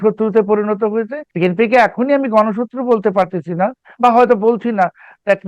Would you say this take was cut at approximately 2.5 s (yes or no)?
no